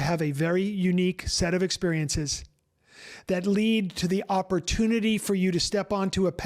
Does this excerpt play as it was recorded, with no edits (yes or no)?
yes